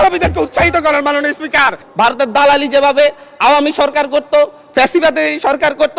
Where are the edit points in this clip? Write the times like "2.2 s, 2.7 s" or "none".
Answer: 1.8 s